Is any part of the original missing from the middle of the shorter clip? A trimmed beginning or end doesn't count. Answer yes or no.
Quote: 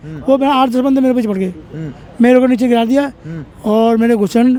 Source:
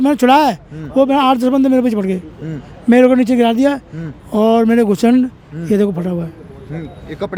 no